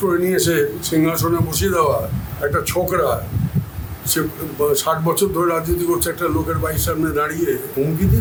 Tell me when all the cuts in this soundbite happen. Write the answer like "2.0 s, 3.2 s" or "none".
none